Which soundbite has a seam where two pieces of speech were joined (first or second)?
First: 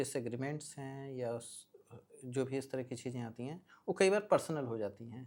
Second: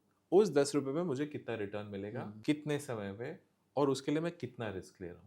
second